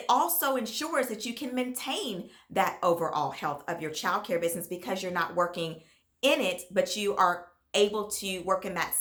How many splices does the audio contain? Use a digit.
0